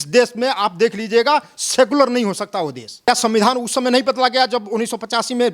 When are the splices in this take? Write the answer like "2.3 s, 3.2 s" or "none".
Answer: 3.1 s